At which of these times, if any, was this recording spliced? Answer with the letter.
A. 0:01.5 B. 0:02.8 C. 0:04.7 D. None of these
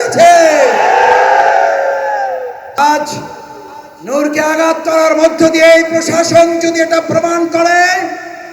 B